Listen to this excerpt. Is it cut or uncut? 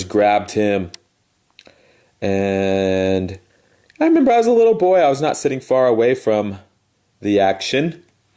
cut